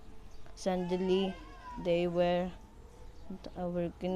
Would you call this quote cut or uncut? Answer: cut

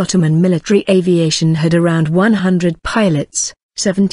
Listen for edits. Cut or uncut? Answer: cut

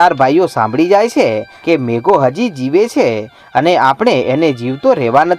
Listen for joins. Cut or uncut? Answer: cut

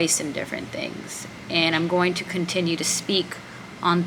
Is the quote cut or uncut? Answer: uncut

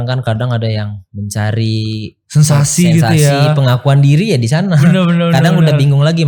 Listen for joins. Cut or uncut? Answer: uncut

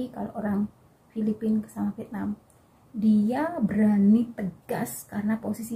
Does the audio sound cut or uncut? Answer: uncut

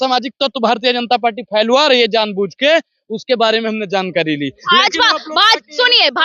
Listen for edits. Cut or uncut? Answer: uncut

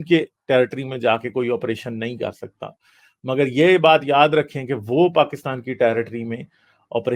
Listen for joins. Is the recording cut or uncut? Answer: uncut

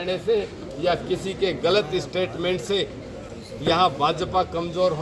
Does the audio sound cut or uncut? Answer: uncut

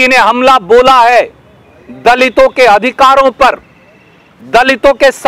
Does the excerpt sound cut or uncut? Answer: uncut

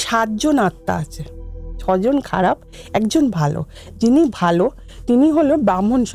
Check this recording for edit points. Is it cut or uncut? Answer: uncut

